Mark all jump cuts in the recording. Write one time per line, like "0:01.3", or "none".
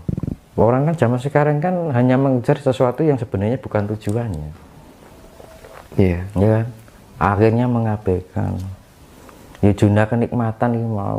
none